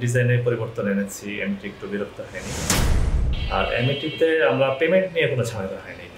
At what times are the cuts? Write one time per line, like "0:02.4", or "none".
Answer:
0:03.0